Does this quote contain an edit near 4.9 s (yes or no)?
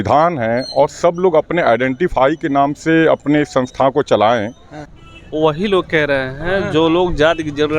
yes